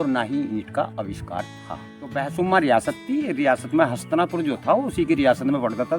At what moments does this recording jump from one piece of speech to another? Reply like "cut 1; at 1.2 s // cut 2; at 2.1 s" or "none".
cut 1; at 2.1 s